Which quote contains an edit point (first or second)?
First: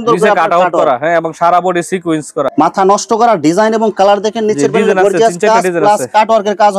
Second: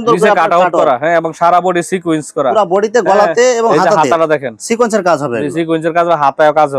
first